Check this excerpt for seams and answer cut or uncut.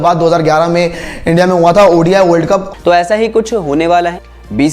cut